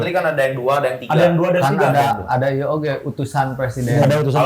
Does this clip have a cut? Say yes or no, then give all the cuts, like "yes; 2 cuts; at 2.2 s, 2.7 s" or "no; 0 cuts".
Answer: no; 0 cuts